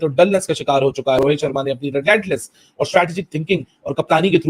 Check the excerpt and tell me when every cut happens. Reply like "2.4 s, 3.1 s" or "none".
1.2 s